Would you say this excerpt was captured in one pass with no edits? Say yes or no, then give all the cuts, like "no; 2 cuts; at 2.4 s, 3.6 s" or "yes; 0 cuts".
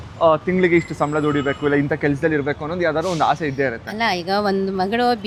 yes; 0 cuts